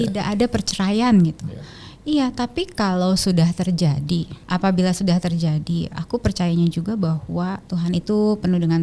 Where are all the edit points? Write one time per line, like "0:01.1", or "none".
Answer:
0:04.4
0:07.6